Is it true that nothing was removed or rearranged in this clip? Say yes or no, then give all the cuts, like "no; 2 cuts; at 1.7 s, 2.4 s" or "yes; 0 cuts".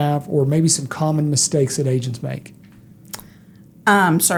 yes; 0 cuts